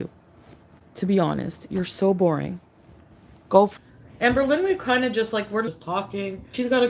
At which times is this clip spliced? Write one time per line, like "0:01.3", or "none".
0:03.7
0:05.8